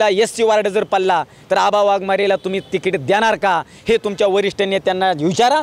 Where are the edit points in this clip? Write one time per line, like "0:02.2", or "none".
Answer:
none